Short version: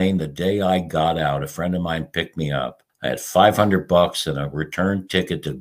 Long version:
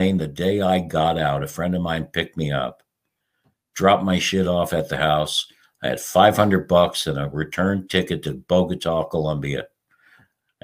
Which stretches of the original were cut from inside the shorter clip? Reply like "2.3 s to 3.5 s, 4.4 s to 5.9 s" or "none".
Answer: 2.8 s to 5.6 s